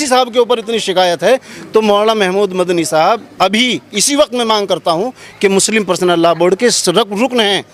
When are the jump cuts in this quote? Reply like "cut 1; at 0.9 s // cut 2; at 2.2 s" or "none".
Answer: none